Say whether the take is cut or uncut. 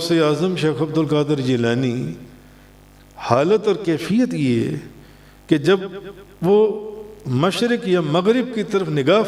uncut